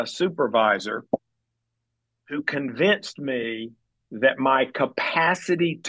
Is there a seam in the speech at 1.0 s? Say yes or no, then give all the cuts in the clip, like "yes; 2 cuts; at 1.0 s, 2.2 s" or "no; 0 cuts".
no; 0 cuts